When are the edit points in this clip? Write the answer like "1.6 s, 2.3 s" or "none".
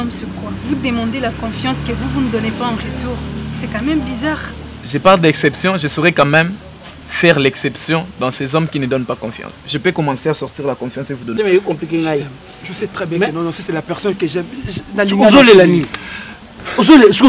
11.3 s